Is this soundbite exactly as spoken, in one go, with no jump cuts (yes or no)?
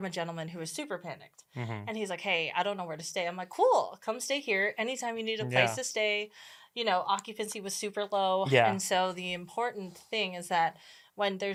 yes